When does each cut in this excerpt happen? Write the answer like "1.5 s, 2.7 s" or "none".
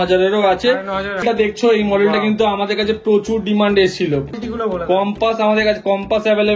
1.2 s, 4.3 s